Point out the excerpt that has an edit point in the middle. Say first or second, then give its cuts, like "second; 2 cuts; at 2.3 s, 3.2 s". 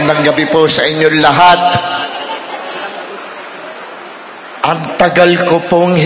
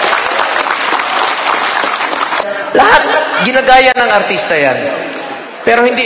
second; 1 cut; at 2.5 s